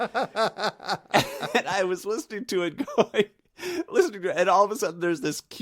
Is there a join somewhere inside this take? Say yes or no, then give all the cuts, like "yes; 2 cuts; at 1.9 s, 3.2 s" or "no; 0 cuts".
yes; 1 cut; at 1.0 s